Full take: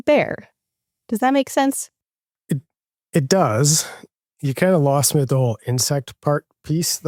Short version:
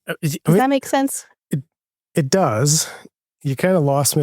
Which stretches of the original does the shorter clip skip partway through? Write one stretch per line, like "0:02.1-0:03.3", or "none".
0:01.9-0:02.3